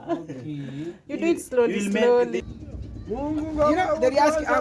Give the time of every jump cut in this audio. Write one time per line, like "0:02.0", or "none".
0:02.5